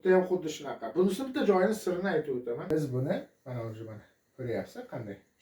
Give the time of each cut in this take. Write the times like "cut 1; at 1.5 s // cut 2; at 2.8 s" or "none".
cut 1; at 2.7 s